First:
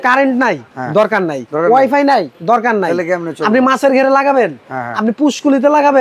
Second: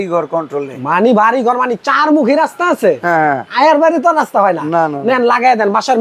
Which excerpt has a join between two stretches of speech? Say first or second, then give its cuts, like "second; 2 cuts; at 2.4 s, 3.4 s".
first; 2 cuts; at 1.0 s, 2.3 s